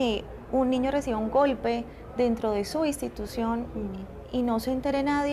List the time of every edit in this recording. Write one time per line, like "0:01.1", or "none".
none